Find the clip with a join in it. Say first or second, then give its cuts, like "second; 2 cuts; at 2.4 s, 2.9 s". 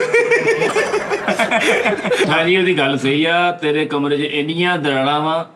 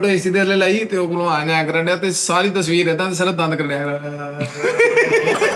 first; 1 cut; at 2.3 s